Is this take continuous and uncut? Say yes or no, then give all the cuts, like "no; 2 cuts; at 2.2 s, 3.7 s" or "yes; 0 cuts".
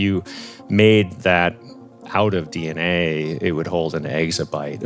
yes; 0 cuts